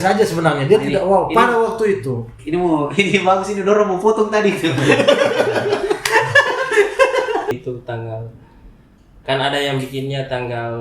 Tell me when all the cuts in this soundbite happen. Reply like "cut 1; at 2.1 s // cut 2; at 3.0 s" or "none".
cut 1; at 7.5 s